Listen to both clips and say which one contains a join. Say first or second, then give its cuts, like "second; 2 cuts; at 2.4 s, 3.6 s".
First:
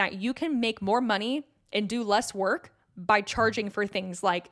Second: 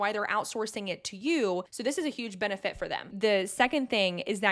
second; 2 cuts; at 1.7 s, 3.1 s